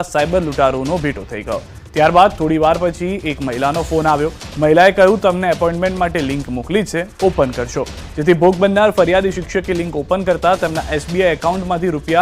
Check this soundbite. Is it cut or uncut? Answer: cut